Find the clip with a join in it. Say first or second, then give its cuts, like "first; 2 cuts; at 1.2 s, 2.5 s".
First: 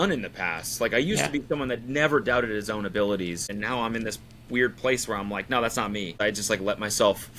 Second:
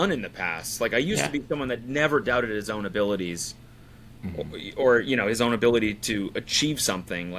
first; 2 cuts; at 3.5 s, 6.2 s